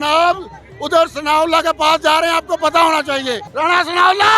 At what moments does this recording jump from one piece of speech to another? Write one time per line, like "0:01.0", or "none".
0:03.4